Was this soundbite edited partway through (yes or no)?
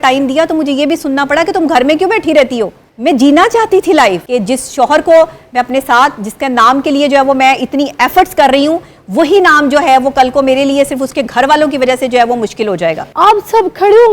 yes